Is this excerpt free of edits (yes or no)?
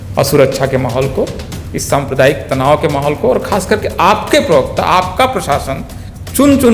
yes